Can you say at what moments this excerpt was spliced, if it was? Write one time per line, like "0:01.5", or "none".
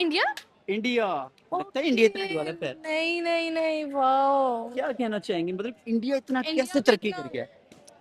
none